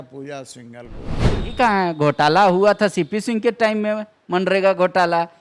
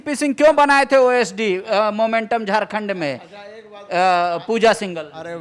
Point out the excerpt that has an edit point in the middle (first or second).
first